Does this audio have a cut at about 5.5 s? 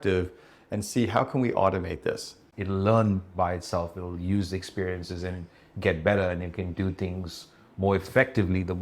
no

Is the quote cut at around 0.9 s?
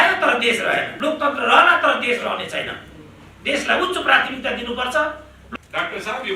yes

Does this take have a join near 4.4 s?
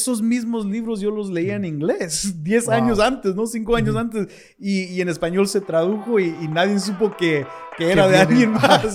no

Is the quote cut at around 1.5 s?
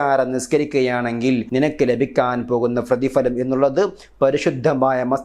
yes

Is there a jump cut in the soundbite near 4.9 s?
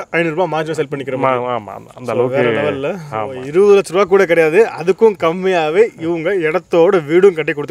no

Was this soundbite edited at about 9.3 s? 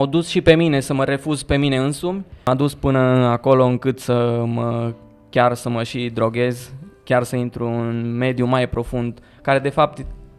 no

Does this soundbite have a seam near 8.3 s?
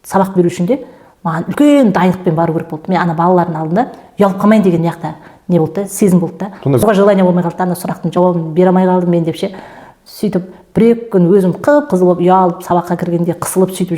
no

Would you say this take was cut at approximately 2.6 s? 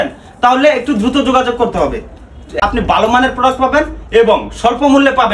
yes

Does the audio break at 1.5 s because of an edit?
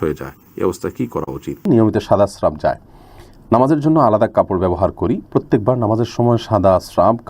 yes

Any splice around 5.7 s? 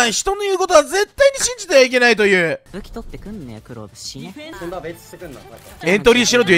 yes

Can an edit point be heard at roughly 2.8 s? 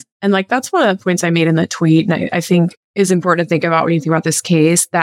yes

